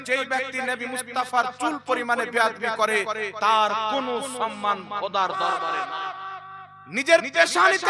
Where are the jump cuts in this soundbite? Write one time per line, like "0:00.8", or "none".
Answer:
0:05.6